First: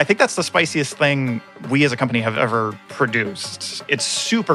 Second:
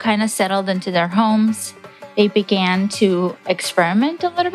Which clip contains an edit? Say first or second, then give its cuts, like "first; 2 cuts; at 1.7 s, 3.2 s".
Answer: first; 1 cut; at 3.6 s